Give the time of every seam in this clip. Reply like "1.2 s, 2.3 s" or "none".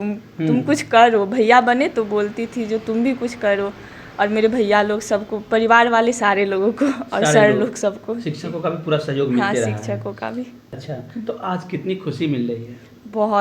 10.6 s